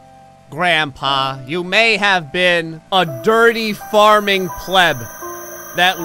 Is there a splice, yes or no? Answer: yes